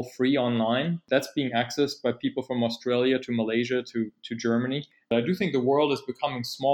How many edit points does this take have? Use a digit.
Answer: 1